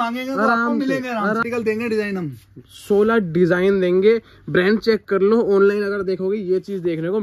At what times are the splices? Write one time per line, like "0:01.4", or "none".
0:01.4